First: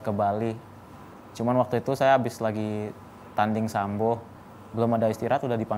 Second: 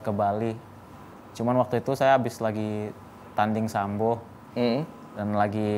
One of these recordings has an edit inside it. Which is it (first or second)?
first